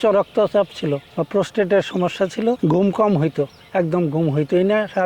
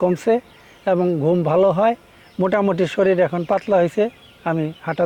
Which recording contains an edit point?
first; 2 cuts; at 1.1 s, 2.6 s

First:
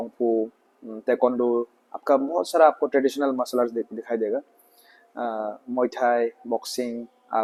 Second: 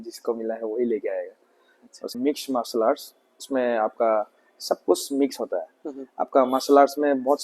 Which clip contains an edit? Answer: second; 1 cut; at 2.1 s

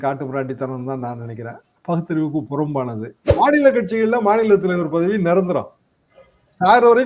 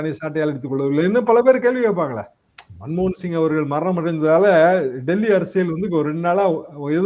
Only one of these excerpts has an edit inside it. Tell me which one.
first; 1 cut; at 3.2 s

